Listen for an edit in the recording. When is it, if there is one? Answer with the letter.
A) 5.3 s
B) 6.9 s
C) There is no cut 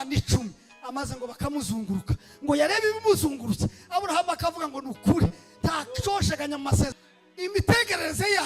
B